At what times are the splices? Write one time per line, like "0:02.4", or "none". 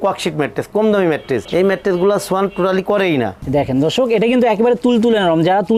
0:03.4

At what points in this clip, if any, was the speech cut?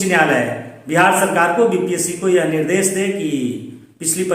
none

